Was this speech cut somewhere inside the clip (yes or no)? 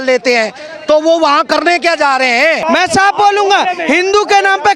yes